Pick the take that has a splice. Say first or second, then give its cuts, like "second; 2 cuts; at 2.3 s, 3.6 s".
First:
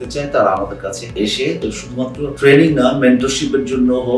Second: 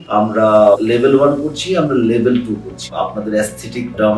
second; 1 cut; at 2.8 s